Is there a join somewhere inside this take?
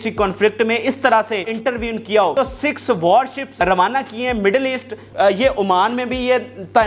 yes; 4 cuts; at 1.5 s, 2.3 s, 3.5 s, 5.0 s

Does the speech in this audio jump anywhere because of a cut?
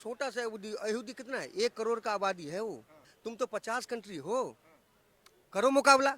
yes; 1 cut; at 3.0 s

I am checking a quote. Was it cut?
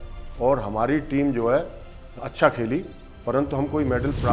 no; 0 cuts

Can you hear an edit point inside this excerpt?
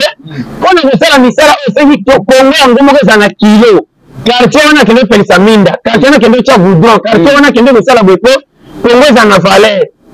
no; 0 cuts

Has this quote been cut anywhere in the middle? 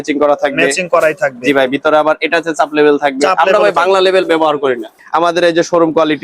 yes; 1 cut; at 5.0 s

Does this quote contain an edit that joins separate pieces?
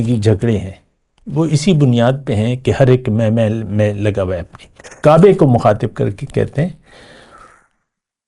yes; 1 cut; at 4.9 s

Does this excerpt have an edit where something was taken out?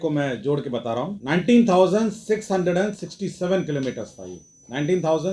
yes; 1 cut; at 1.2 s

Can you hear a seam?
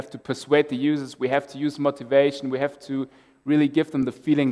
no; 0 cuts

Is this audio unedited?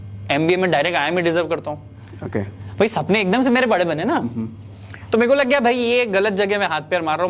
yes; 0 cuts

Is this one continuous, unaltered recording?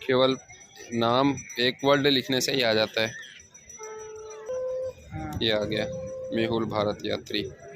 no; 1 cut; at 4.5 s

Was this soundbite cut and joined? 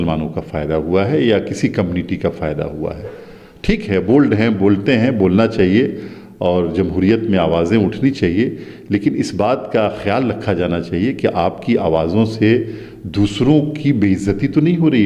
no; 0 cuts

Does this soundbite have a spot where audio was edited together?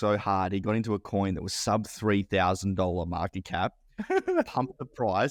no; 0 cuts

